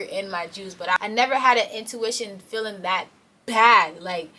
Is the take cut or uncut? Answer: cut